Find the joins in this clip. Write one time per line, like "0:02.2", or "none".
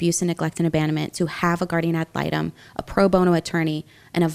none

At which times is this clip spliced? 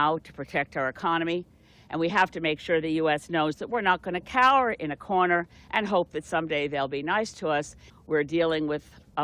0:07.8

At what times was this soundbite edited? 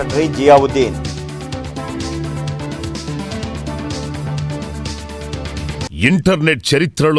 0:05.9

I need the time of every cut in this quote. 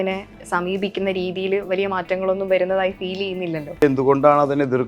0:03.8

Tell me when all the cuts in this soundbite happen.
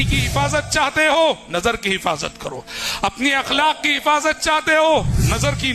none

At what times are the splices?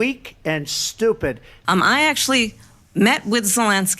0:01.6

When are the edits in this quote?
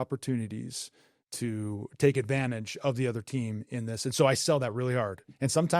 none

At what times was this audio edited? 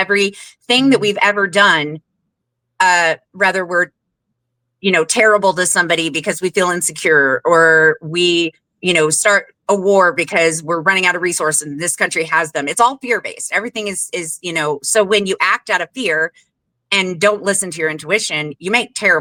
none

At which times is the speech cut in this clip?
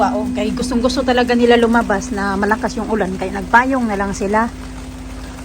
none

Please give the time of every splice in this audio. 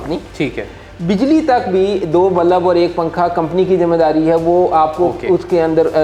none

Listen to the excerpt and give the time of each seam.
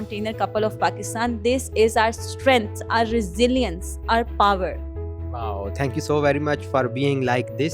none

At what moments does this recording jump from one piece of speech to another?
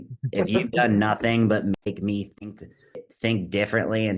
0:03.1

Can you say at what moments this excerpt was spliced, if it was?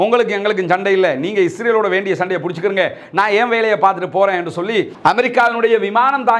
0:04.9

